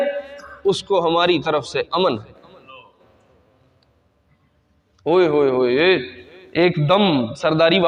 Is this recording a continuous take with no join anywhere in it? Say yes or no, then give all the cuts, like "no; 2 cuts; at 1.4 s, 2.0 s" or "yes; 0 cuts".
yes; 0 cuts